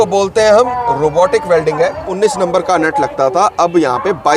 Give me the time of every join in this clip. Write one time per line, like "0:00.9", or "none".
0:02.1